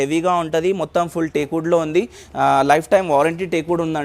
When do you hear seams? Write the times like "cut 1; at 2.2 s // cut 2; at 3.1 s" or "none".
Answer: none